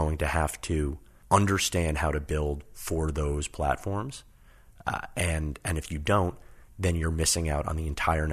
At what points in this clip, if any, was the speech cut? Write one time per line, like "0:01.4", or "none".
0:01.1